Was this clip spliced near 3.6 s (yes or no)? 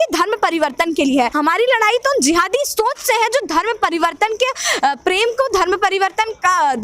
no